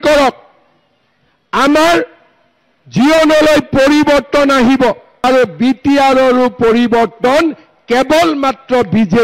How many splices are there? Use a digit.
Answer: 1